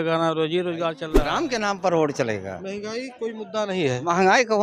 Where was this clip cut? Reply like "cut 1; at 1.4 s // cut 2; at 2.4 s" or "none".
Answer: cut 1; at 1.1 s